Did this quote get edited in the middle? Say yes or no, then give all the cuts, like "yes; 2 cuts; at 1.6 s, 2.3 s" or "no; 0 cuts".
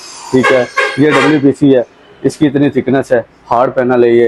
no; 0 cuts